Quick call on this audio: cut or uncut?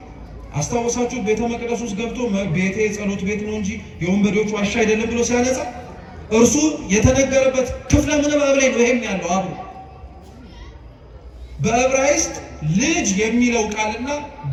uncut